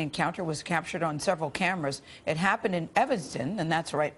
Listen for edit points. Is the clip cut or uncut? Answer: cut